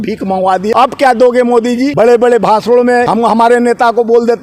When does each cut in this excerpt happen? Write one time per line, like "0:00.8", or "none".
0:00.7
0:01.9
0:03.1